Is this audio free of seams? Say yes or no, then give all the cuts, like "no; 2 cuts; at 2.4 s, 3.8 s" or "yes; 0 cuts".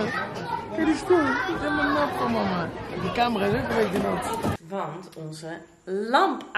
no; 1 cut; at 4.6 s